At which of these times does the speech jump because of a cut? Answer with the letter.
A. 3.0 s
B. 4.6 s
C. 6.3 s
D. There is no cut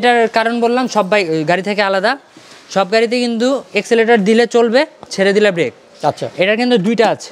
D